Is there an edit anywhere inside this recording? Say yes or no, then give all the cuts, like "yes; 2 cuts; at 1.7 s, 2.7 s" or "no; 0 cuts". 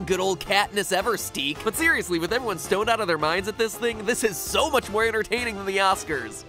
no; 0 cuts